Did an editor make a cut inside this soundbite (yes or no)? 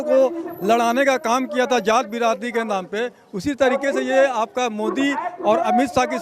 no